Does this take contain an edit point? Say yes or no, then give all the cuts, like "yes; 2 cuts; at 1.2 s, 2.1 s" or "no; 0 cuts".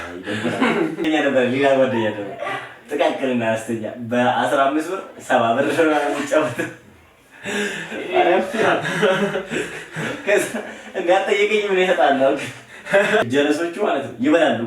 yes; 2 cuts; at 1.0 s, 13.2 s